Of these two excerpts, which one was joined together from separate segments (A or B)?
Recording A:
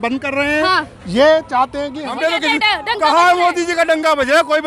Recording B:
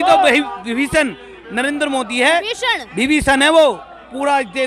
A